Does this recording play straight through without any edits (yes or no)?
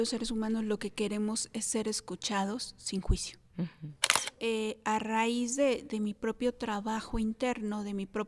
no